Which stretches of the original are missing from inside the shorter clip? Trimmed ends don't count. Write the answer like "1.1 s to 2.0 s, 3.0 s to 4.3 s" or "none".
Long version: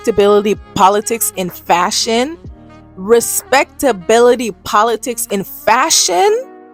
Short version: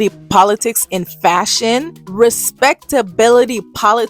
2.4 s to 2.9 s